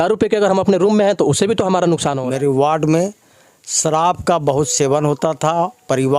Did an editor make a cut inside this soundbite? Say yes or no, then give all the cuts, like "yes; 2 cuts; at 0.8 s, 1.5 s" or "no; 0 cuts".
yes; 1 cut; at 2.2 s